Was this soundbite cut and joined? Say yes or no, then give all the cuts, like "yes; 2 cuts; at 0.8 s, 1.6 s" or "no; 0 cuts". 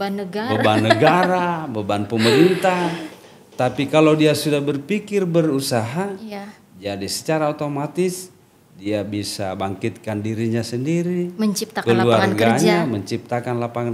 no; 0 cuts